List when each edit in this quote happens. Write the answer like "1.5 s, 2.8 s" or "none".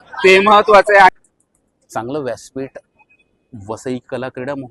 1.3 s